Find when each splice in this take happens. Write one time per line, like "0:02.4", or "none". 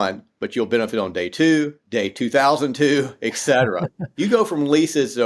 0:01.8
0:04.0